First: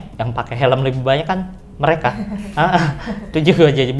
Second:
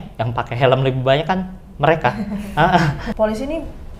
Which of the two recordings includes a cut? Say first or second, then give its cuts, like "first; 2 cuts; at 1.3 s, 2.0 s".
second; 1 cut; at 3.0 s